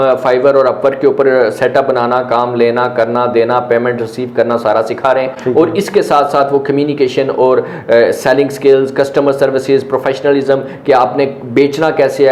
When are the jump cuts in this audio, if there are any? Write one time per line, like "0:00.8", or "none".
none

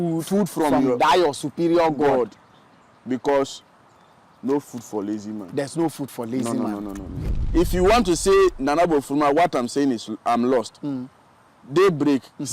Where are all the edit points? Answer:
0:07.4

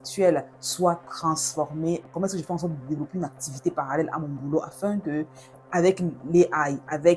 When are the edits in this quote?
0:02.1

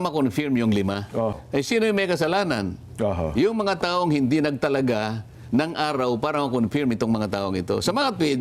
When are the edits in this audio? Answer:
0:01.3

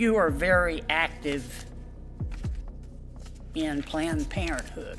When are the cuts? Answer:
0:01.8
0:03.3

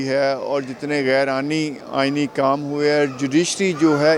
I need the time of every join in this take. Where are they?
none

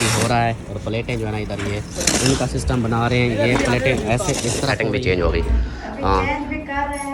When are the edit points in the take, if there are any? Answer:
0:04.8

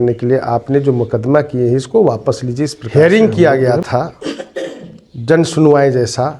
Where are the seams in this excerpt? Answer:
0:02.8

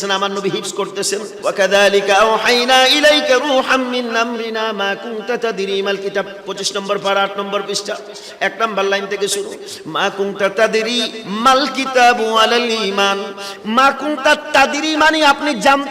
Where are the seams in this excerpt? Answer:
0:01.3
0:13.5

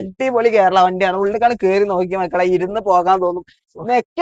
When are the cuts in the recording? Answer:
none

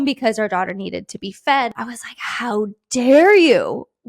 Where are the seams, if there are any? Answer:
0:01.8

